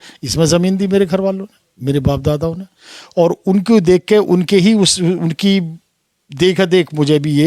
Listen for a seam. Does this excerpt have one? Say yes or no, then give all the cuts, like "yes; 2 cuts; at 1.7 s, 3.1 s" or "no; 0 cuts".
no; 0 cuts